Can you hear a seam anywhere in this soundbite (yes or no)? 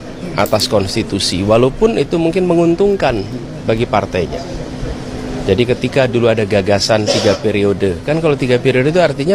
no